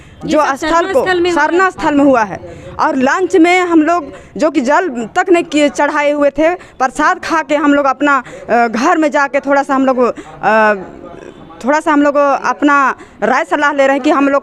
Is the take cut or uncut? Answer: uncut